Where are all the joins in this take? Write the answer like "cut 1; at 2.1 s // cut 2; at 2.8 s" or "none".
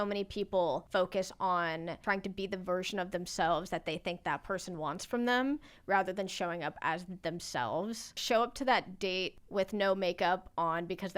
cut 1; at 0.8 s // cut 2; at 2.0 s // cut 3; at 8.2 s // cut 4; at 9.4 s